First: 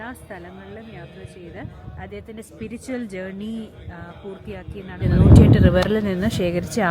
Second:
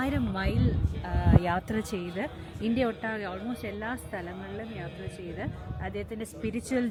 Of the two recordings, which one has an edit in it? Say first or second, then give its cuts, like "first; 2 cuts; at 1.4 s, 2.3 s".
first; 1 cut; at 5.1 s